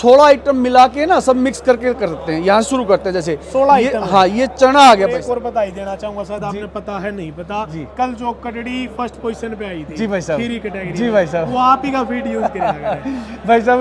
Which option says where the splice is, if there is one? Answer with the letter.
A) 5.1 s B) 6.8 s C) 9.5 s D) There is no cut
A